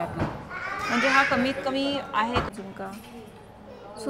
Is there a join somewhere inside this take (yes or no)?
yes